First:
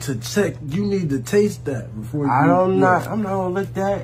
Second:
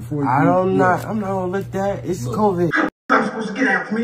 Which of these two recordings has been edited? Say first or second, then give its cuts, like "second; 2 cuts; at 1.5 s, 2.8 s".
second; 1 cut; at 3.0 s